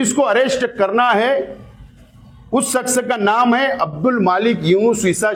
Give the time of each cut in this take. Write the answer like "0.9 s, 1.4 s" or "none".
none